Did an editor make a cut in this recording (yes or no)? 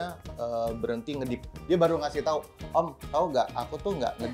yes